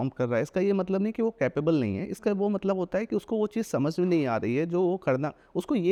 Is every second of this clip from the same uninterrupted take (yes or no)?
yes